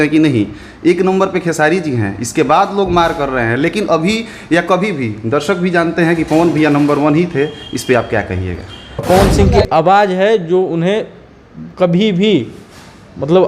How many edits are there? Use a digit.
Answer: 1